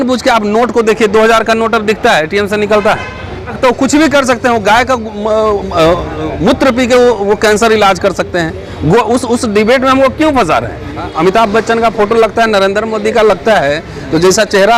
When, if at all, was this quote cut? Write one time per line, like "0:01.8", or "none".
0:03.5
0:11.1